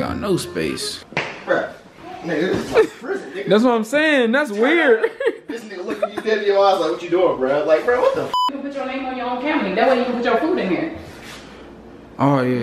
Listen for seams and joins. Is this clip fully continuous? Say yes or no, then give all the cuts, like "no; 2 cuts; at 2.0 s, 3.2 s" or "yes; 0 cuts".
no; 2 cuts; at 1.1 s, 8.6 s